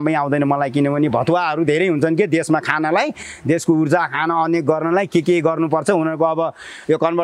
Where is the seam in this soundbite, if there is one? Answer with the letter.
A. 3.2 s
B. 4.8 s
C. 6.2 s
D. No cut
D